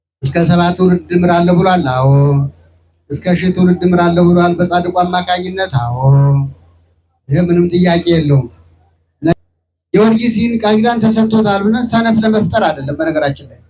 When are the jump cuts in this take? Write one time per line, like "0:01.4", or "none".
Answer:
0:09.3

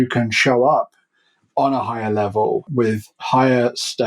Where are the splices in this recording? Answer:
0:02.7

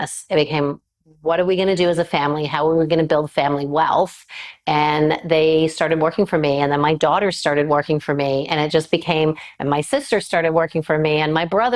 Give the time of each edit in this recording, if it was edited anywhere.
none

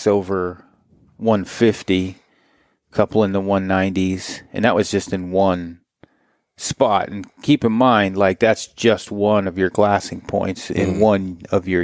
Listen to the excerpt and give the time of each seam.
none

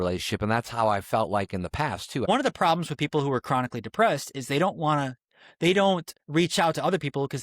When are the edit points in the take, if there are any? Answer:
0:02.2
0:06.1

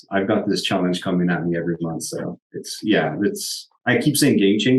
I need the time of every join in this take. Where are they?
none

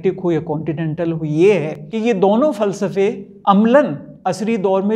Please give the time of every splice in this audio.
0:01.8
0:03.3
0:04.1

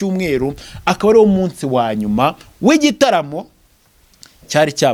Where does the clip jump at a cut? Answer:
none

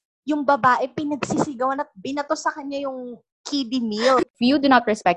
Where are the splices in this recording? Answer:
0:04.2

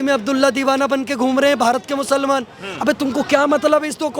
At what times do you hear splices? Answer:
none

